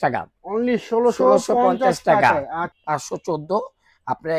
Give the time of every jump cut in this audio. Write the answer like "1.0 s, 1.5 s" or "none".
2.7 s